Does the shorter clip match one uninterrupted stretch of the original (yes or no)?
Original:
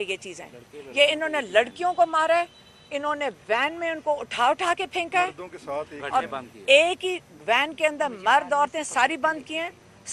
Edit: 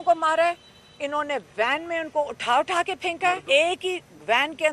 no